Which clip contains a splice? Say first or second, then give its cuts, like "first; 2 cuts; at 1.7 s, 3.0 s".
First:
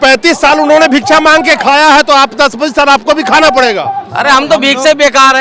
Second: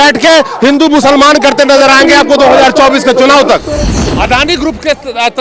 second; 1 cut; at 3.8 s